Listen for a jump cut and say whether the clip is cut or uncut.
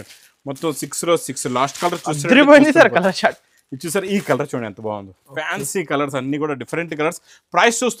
uncut